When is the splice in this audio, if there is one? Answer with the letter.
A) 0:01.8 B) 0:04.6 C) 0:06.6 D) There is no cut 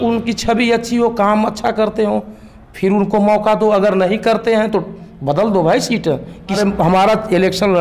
C